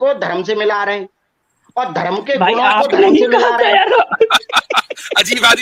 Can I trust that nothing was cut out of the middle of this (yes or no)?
yes